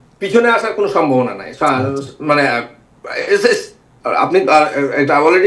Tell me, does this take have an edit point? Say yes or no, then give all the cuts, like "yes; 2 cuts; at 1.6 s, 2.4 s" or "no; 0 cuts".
no; 0 cuts